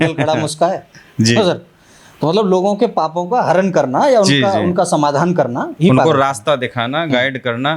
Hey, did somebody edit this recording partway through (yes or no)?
no